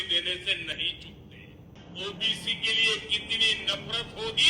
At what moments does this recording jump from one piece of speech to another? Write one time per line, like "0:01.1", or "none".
0:01.8

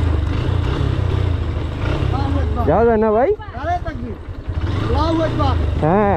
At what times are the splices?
0:01.1

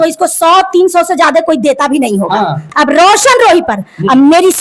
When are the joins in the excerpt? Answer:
0:02.6

